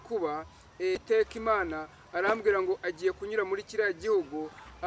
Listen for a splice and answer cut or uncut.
cut